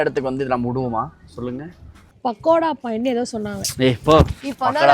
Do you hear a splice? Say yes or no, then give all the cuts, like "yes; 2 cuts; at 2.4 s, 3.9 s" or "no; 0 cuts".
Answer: yes; 1 cut; at 2.2 s